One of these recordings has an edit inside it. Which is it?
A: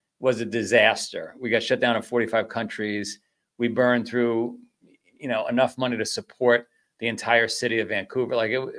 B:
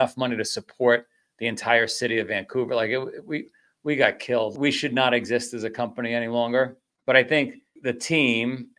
B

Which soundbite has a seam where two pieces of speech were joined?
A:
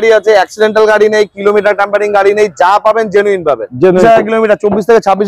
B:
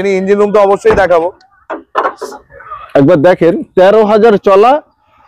A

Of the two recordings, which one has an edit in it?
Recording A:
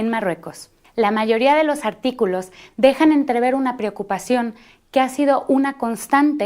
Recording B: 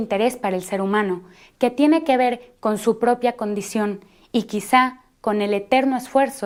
A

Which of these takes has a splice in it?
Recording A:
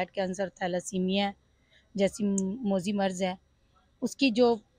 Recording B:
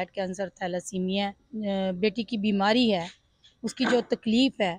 B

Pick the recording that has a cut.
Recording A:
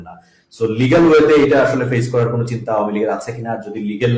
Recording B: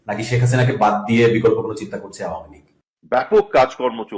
B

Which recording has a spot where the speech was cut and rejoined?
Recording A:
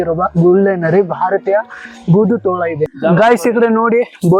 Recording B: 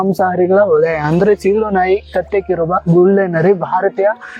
A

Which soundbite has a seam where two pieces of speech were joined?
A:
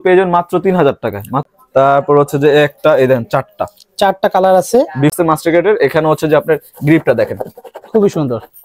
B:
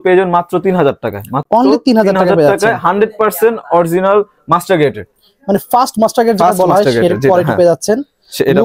A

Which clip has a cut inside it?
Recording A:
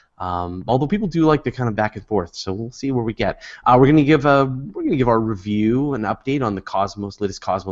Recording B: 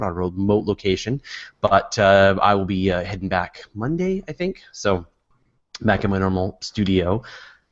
A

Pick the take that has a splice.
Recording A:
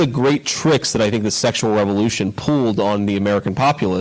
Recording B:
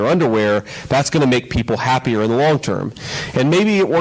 B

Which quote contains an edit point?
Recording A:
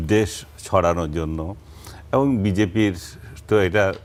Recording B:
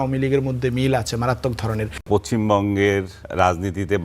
B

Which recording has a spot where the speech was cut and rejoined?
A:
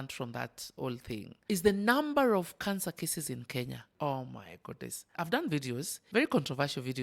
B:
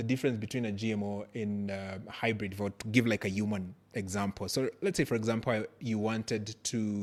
A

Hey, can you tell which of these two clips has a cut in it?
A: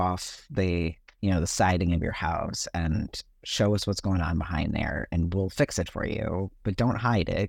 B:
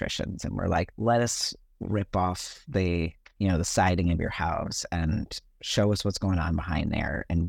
B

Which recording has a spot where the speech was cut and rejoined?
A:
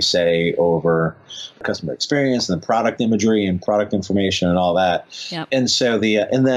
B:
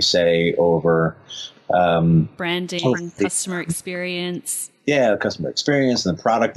A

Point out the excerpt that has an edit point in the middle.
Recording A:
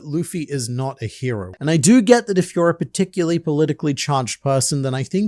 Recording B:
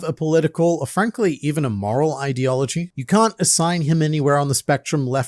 A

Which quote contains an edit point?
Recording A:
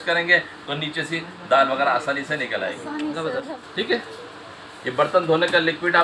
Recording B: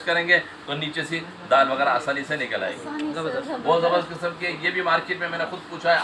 A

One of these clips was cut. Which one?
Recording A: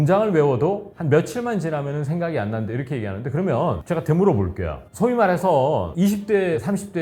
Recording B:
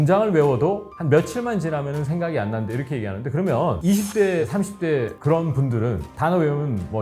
B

